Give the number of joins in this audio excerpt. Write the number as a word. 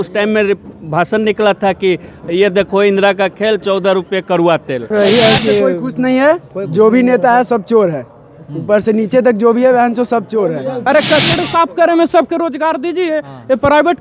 two